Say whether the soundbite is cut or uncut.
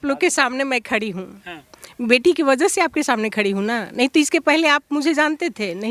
uncut